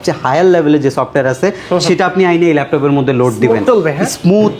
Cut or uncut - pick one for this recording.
uncut